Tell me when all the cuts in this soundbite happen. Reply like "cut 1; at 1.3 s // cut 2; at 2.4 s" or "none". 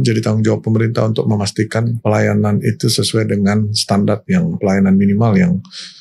cut 1; at 2.0 s // cut 2; at 4.6 s